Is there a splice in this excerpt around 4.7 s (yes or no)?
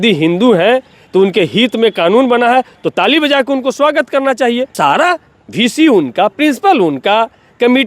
yes